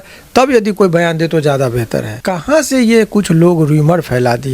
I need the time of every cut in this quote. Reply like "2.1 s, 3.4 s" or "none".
2.2 s